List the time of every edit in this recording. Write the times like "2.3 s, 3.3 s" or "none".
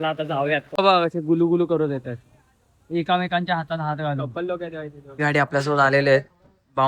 5.2 s

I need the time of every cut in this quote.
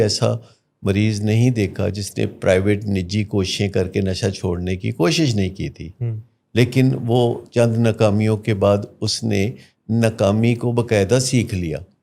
none

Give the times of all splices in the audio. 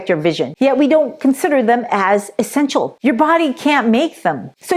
2.9 s

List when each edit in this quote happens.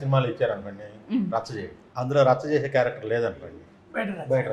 none

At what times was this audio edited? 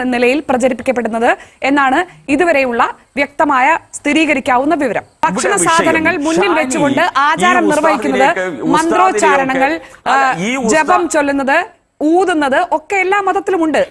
5.2 s

